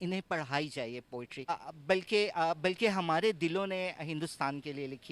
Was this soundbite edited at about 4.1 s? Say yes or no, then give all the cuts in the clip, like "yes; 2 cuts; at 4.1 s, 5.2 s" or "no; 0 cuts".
no; 1 cut; at 1.5 s